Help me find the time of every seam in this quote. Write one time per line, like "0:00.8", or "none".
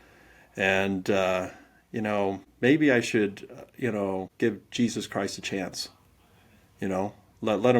0:02.5
0:04.3